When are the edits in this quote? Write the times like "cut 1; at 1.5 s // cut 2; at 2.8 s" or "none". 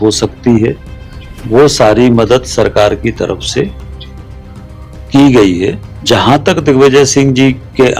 cut 1; at 5.9 s